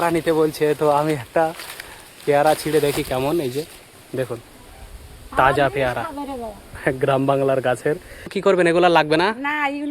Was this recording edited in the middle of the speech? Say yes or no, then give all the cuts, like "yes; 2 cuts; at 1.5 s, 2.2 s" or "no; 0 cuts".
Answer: yes; 2 cuts; at 6.7 s, 8.4 s